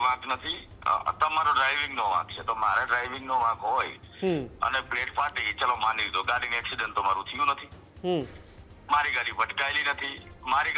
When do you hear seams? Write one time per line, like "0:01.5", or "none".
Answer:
none